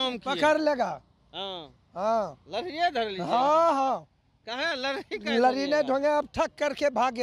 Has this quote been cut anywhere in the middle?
no; 0 cuts

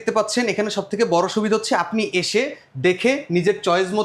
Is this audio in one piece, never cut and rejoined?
yes; 0 cuts

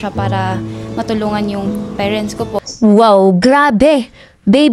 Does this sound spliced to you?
yes; 1 cut; at 2.7 s

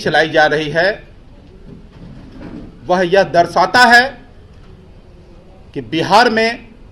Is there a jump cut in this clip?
no; 0 cuts

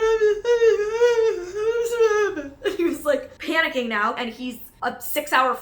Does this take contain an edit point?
yes; 1 cut; at 4.2 s

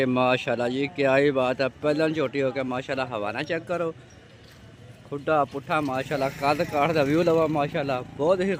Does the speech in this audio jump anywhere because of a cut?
no; 0 cuts

